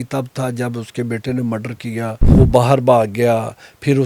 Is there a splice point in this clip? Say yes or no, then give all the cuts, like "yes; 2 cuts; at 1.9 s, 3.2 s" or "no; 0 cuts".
yes; 1 cut; at 2.2 s